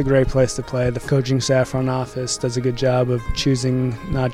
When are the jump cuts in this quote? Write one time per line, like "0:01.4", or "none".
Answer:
0:01.0